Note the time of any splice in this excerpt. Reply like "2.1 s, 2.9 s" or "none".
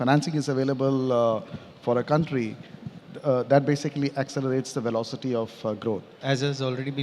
6.1 s